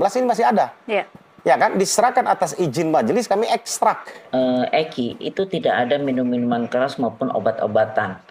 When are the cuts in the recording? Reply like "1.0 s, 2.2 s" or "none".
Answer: 4.2 s